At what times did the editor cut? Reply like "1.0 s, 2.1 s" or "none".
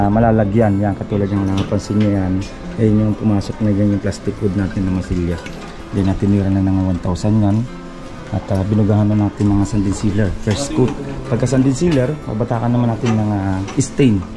none